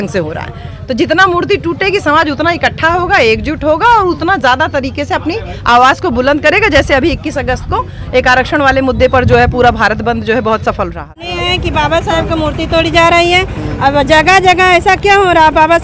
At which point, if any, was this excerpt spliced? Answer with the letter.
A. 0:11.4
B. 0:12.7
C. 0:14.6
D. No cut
A